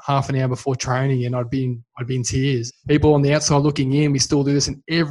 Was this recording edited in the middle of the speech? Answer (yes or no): yes